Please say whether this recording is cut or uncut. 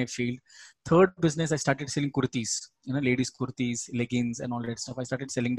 uncut